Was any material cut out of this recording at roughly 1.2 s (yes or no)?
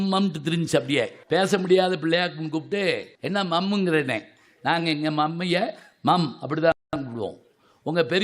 yes